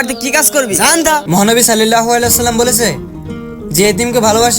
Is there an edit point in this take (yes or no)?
yes